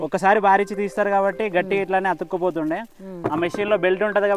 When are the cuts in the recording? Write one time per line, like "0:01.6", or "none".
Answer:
none